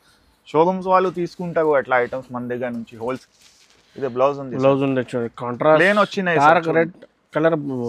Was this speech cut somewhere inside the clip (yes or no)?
yes